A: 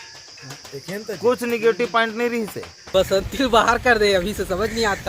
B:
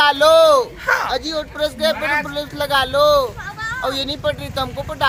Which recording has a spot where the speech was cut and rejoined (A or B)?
A